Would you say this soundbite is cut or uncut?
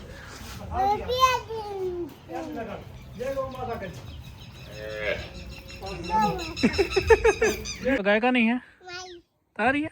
cut